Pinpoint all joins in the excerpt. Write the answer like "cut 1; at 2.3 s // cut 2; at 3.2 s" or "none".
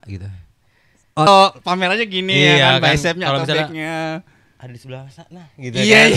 cut 1; at 1.3 s